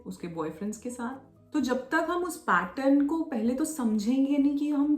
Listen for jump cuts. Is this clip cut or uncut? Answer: cut